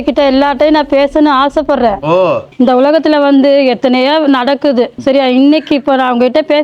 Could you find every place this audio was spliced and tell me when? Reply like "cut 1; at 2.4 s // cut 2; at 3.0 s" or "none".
cut 1; at 2.5 s // cut 2; at 5.0 s

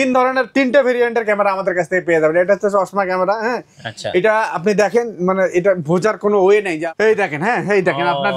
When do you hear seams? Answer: cut 1; at 6.8 s

